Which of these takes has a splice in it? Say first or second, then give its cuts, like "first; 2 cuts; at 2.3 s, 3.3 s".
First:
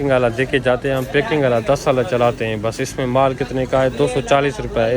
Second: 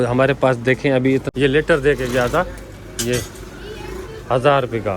second; 1 cut; at 1.3 s